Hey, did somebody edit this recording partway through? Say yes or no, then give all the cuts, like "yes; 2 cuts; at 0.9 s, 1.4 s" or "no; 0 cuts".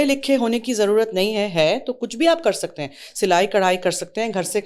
no; 0 cuts